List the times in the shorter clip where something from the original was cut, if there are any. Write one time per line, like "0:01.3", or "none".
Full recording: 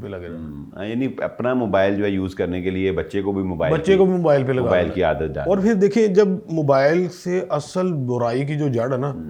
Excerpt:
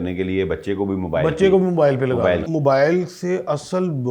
0:02.4